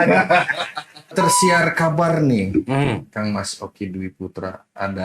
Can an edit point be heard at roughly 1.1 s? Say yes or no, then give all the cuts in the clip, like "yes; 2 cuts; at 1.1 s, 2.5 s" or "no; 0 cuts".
yes; 1 cut; at 1.1 s